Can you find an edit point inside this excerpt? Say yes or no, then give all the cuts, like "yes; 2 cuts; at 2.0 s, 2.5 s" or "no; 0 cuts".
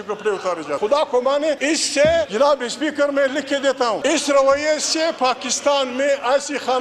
yes; 4 cuts; at 0.8 s, 1.6 s, 2.3 s, 4.0 s